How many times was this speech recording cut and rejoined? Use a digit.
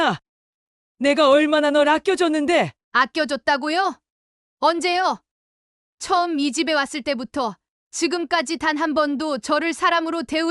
0